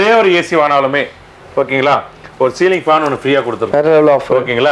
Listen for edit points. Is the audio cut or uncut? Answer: uncut